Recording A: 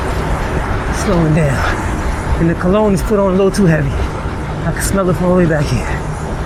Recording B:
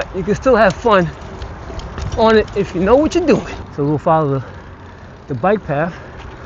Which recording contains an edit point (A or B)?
B